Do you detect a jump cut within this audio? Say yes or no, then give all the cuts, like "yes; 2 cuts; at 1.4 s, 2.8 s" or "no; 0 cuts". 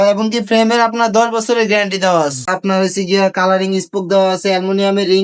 yes; 1 cut; at 2.4 s